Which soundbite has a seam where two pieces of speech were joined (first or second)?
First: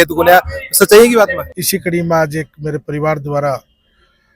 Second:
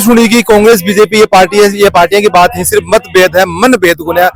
first